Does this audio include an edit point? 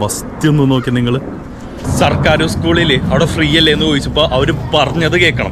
yes; 1 cut; at 1.9 s

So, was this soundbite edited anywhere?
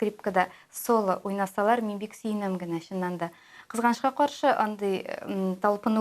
no; 0 cuts

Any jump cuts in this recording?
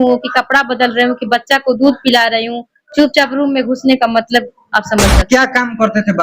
yes; 1 cut; at 5.2 s

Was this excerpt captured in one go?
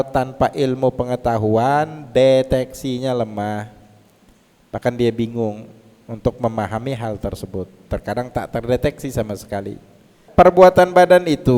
no; 1 cut; at 10.2 s

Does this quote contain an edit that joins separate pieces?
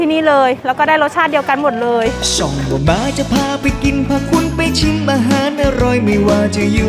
yes; 1 cut; at 2.2 s

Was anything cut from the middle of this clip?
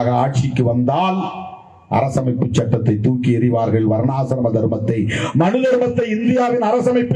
no; 0 cuts

